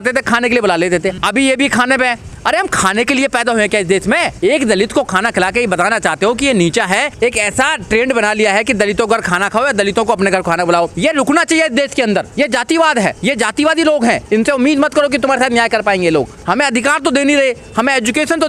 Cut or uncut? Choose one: cut